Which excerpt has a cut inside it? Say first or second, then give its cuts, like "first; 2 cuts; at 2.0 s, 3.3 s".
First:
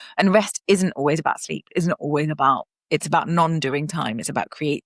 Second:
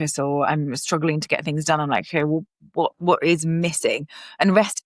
first; 1 cut; at 2.7 s